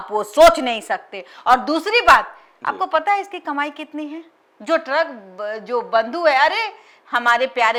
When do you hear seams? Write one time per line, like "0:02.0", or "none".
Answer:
none